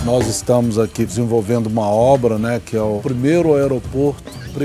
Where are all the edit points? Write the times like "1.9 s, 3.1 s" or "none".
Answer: 3.0 s